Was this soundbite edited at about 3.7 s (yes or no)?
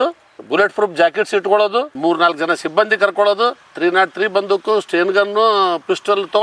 no